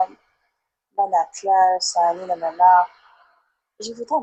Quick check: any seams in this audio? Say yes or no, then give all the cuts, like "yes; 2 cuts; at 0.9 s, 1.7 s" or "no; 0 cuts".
no; 0 cuts